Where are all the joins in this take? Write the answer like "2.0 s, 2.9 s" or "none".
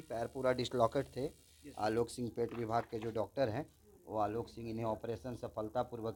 none